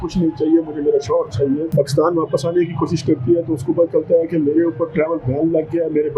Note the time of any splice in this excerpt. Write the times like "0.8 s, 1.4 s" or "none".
1.7 s